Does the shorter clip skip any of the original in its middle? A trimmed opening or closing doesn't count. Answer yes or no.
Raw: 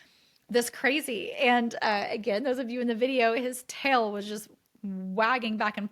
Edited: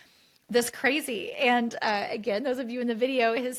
no